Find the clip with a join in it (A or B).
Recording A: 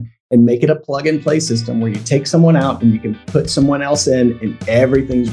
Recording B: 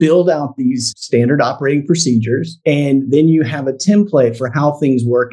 B